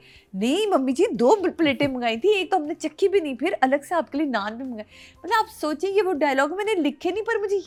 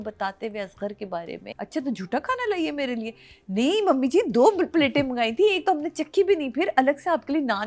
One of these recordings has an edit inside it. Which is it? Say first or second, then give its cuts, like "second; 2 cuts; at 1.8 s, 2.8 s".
second; 1 cut; at 1.4 s